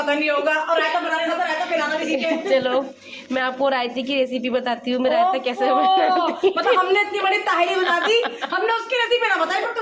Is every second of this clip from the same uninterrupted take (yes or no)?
yes